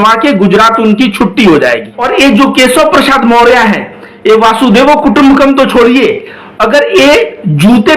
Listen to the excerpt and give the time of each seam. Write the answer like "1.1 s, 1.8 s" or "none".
1.9 s